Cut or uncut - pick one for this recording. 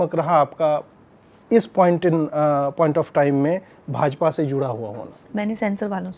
cut